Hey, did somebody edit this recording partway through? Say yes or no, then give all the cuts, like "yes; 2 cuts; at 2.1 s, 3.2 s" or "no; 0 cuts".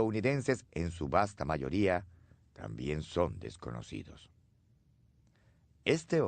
yes; 1 cut; at 3.4 s